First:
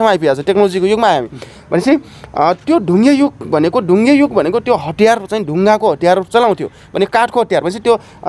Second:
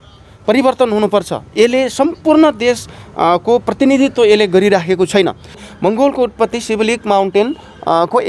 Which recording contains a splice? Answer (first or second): second